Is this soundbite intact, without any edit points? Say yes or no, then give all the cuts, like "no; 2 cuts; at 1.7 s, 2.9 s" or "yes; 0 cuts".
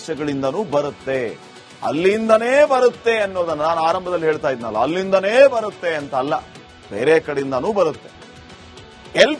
yes; 0 cuts